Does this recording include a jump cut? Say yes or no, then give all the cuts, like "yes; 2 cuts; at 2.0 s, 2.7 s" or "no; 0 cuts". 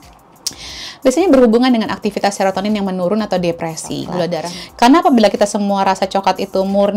yes; 1 cut; at 4.5 s